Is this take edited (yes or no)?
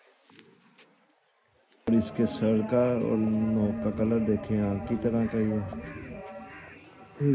yes